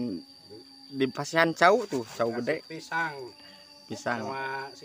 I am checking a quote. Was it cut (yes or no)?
no